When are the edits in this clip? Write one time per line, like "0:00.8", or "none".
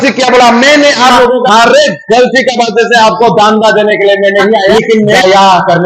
0:01.4
0:04.9